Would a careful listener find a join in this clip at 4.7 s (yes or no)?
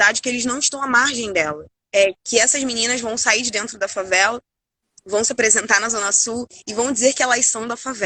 no